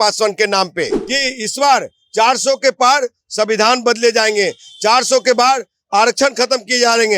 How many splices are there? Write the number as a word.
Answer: one